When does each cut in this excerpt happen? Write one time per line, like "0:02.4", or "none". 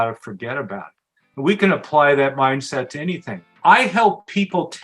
0:03.5